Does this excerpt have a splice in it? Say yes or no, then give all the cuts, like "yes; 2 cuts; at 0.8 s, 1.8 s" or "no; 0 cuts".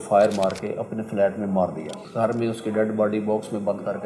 yes; 1 cut; at 2.0 s